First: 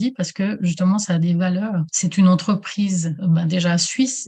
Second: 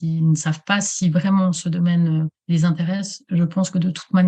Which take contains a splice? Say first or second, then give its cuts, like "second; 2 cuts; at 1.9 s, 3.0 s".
first; 1 cut; at 3.1 s